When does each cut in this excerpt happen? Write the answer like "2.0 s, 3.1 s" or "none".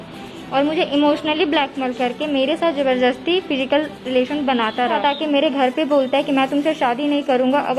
5.0 s